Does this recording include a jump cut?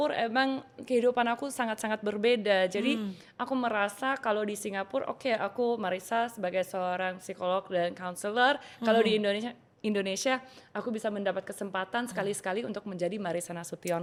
no; 0 cuts

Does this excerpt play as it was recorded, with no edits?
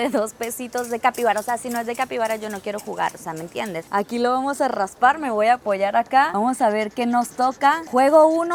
yes; 0 cuts

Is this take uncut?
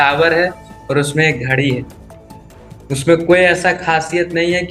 yes; 0 cuts

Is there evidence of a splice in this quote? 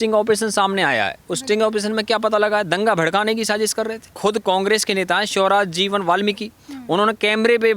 yes; 1 cut; at 4.1 s

